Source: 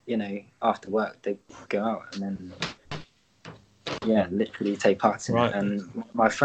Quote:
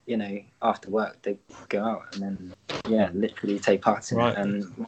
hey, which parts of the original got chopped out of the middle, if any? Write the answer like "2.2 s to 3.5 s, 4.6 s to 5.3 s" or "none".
2.5 s to 3.7 s